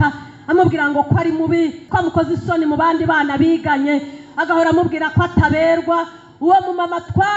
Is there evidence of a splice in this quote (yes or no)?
yes